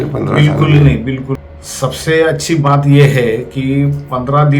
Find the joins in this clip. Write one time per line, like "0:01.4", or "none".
0:01.3